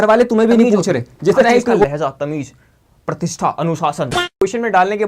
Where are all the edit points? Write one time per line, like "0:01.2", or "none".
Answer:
0:01.8
0:04.2

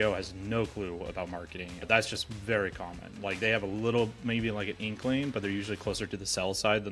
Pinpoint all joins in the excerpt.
0:01.8

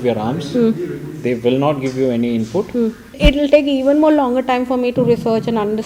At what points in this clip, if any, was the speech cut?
0:03.1

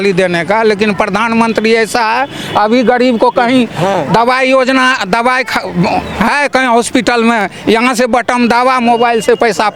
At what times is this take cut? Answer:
none

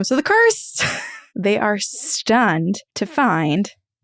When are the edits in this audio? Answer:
0:01.2
0:02.9

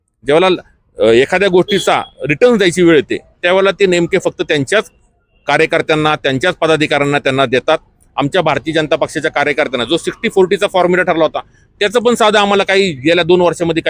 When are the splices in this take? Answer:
none

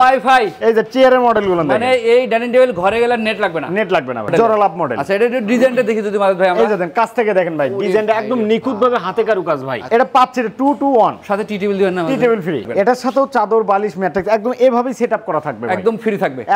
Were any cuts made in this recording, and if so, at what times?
0:04.3
0:09.8
0:12.6

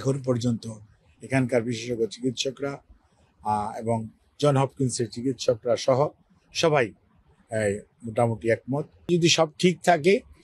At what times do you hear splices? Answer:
0:09.1

